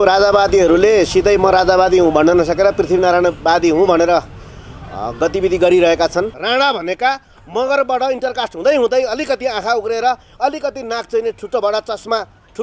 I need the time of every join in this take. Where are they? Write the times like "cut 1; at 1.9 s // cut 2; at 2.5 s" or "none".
cut 1; at 6.4 s